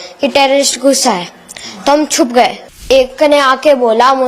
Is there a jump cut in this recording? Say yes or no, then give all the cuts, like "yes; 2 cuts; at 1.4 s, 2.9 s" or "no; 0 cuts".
yes; 1 cut; at 2.8 s